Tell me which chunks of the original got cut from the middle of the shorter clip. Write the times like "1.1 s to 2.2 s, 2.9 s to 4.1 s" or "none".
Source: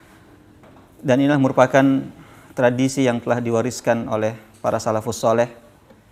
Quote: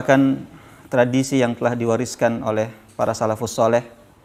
none